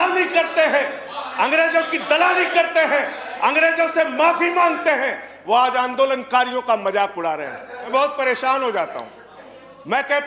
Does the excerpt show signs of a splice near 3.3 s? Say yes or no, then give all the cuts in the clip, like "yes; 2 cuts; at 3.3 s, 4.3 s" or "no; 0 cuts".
no; 1 cut; at 7.9 s